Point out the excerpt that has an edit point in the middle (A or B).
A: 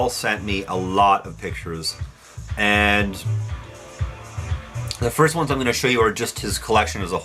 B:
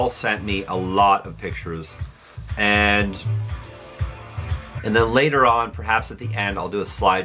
A